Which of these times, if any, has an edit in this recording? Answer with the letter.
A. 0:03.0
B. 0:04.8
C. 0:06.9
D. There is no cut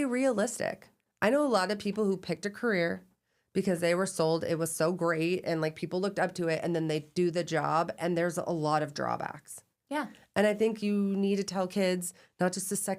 D